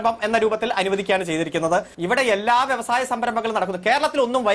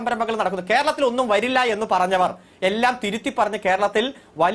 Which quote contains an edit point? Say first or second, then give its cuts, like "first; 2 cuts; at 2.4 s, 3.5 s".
first; 1 cut; at 1.9 s